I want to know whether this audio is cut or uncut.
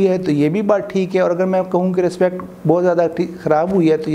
uncut